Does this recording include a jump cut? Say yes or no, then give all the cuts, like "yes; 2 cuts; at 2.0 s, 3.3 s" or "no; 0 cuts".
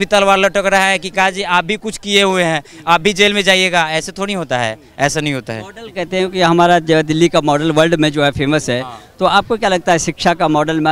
no; 0 cuts